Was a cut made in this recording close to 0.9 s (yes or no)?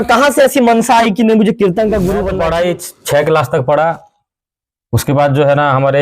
no